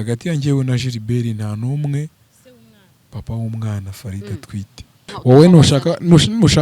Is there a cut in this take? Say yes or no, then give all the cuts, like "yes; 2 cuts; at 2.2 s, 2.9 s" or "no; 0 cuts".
yes; 1 cut; at 5.0 s